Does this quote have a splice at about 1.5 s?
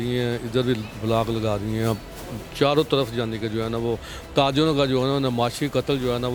no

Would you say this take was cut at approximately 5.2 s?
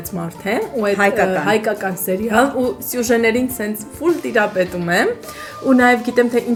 no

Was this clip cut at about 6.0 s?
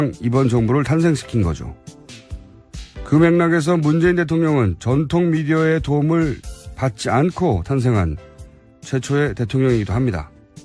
yes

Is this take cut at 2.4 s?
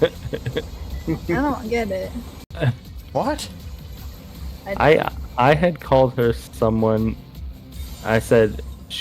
yes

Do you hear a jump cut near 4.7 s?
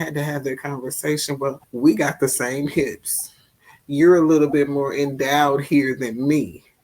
no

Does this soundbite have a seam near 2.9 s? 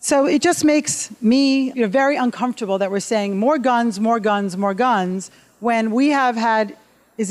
no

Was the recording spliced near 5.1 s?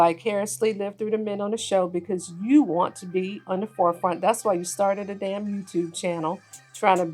no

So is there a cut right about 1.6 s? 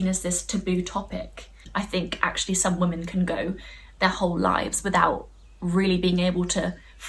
yes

